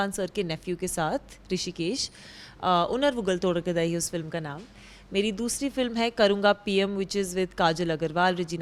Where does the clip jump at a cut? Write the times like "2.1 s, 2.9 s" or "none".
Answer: none